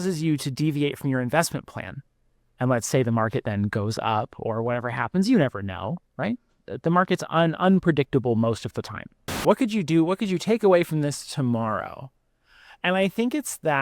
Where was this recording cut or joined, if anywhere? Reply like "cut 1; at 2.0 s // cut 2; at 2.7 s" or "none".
cut 1; at 9.3 s